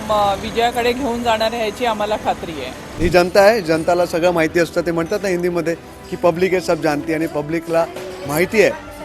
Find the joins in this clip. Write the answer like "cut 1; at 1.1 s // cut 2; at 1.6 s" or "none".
cut 1; at 2.9 s